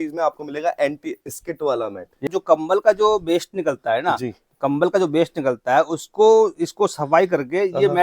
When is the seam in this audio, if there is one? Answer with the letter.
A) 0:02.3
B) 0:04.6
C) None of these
A